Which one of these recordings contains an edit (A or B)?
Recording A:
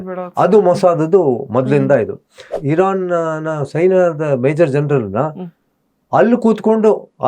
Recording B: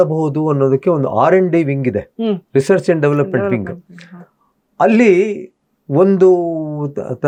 A